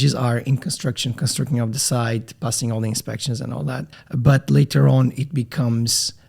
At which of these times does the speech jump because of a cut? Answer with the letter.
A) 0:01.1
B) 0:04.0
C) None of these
B